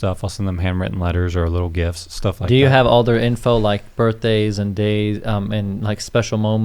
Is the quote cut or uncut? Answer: uncut